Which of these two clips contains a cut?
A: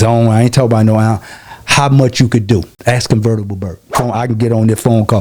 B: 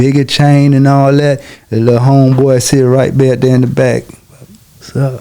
A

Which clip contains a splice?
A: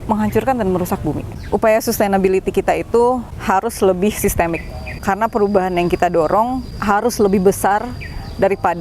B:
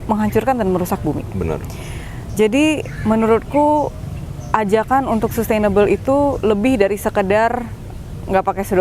A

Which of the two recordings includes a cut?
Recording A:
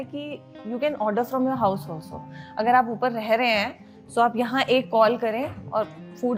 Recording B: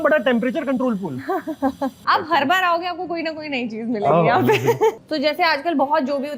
B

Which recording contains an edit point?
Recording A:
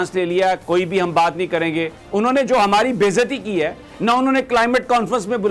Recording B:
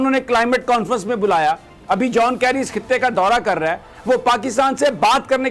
A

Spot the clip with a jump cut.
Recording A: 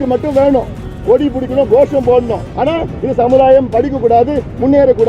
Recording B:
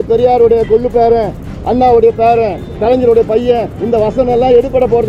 A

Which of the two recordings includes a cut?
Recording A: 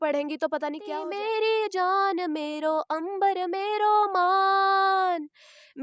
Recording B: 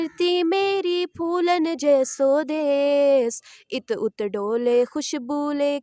A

